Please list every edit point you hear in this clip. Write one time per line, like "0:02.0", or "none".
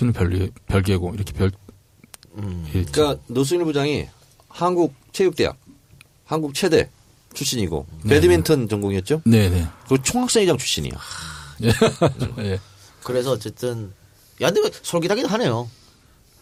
none